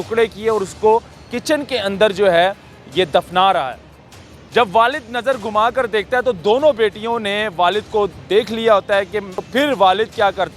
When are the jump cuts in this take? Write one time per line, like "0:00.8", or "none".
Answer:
0:09.4